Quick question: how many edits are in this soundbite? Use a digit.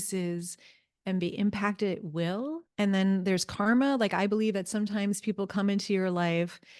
1